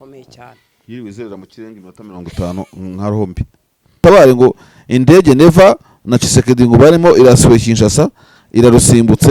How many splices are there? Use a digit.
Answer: 1